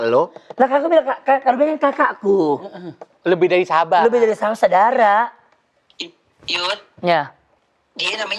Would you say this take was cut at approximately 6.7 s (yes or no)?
no